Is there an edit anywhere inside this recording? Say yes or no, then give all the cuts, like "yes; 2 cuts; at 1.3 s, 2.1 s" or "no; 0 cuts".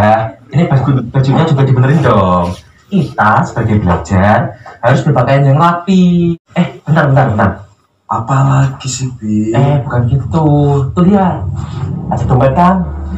yes; 1 cut; at 6.3 s